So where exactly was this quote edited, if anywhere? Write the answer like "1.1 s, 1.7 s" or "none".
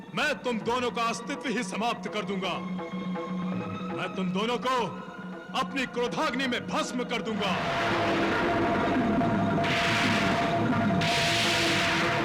7.6 s, 10.3 s

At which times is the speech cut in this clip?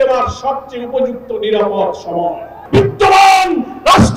2.5 s

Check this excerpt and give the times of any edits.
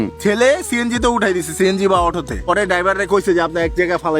2.3 s

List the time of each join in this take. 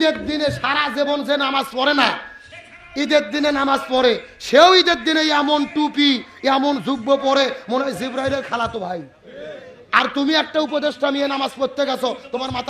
none

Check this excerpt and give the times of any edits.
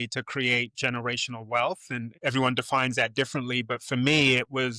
2.1 s

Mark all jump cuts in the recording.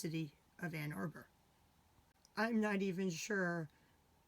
2.2 s

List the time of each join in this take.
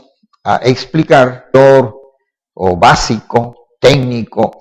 none

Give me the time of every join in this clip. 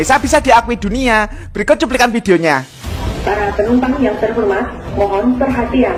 none

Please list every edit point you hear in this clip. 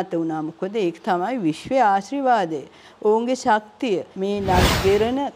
4.1 s

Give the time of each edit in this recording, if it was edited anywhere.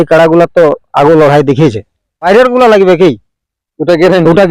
2.2 s

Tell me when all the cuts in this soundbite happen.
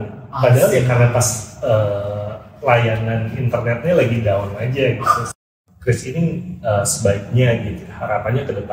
5.3 s

